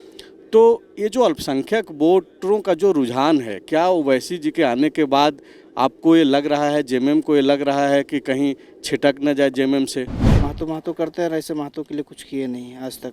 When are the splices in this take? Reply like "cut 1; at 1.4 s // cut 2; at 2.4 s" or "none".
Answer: cut 1; at 10.2 s